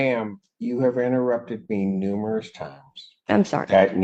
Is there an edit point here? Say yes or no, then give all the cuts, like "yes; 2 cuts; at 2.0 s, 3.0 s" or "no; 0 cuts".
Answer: no; 0 cuts